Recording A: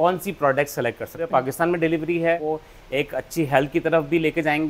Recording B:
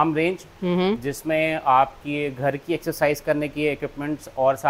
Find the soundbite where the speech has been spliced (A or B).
A